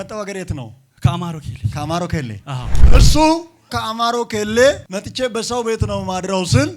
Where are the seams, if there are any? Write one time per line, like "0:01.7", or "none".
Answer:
0:03.0